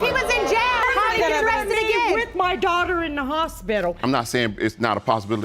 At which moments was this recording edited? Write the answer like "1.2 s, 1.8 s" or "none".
0.8 s, 2.3 s, 4.0 s